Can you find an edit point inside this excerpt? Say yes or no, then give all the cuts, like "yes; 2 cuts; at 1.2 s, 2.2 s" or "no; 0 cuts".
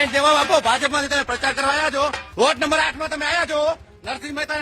yes; 1 cut; at 2.2 s